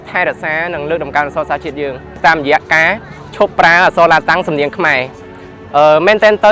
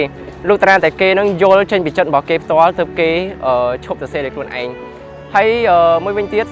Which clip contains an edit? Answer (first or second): first